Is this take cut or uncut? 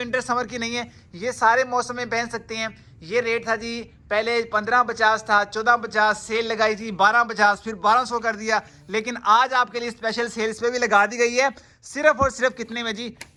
uncut